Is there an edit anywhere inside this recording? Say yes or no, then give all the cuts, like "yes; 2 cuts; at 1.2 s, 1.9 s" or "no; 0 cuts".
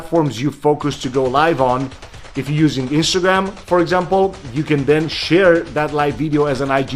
no; 0 cuts